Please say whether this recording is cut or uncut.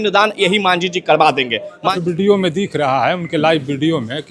cut